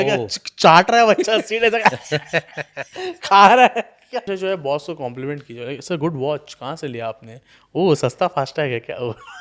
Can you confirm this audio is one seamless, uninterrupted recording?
no; 1 cut; at 4.3 s

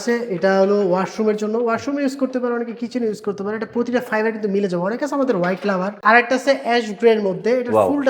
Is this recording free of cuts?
no; 1 cut; at 6.0 s

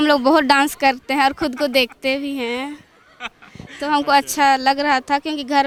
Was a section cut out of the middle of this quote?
no; 0 cuts

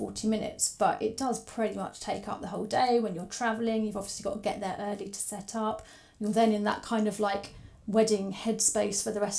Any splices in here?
no; 0 cuts

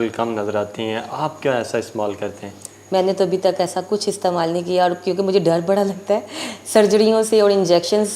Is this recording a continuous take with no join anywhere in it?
yes; 0 cuts

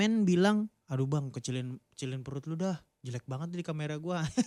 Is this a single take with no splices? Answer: yes; 0 cuts

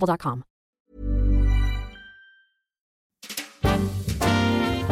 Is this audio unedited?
no; 1 cut; at 3.4 s

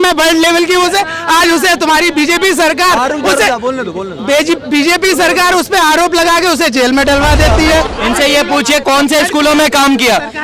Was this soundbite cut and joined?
yes; 1 cut; at 7.9 s

